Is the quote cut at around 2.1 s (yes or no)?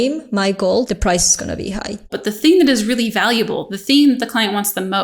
yes